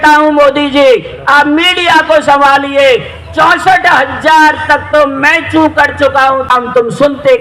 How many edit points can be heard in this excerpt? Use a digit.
1